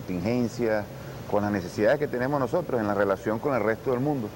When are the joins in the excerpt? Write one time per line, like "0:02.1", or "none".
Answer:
0:02.7